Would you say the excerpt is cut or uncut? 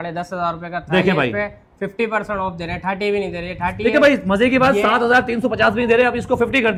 uncut